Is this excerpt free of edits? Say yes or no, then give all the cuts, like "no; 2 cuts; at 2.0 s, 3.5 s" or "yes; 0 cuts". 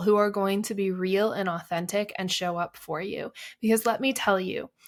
yes; 0 cuts